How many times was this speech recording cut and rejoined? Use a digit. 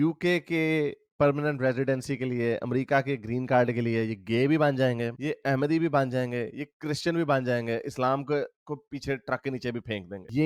0